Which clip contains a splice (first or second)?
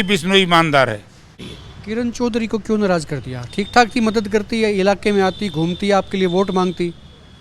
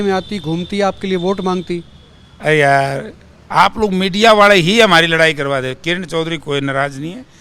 first